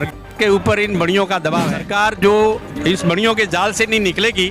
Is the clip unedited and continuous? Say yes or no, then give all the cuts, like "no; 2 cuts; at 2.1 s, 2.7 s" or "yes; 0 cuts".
no; 1 cut; at 1.8 s